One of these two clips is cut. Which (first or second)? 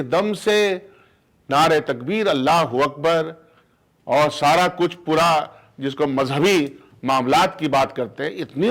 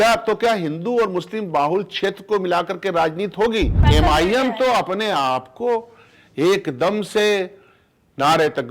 second